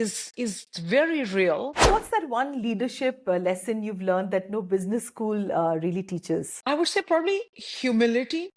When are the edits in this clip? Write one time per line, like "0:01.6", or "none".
0:01.9
0:06.5

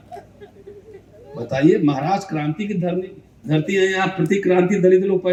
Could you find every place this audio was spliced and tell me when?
none

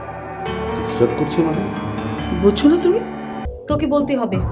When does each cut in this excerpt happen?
0:03.4

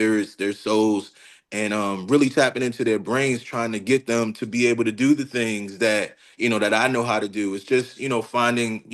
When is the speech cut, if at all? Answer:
none

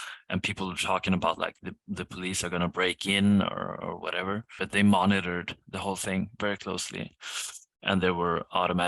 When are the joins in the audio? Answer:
0:04.5

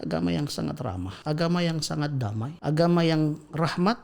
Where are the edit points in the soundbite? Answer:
0:01.1
0:02.5

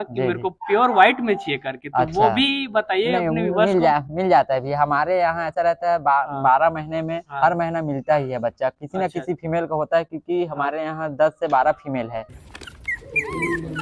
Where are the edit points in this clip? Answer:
0:12.2

